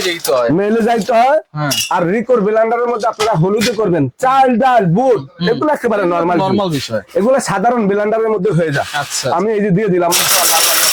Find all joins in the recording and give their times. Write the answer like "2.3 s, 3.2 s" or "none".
none

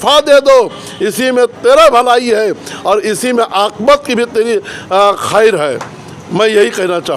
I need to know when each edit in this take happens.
none

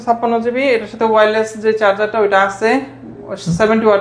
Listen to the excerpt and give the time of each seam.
none

